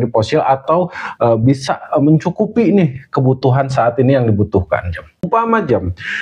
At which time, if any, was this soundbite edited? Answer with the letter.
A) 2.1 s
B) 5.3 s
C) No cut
B